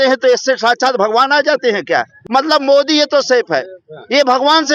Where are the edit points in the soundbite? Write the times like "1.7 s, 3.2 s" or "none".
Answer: 2.2 s